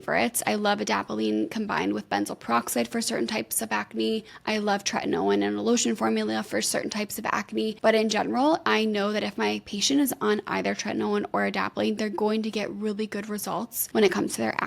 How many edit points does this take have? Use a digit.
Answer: 2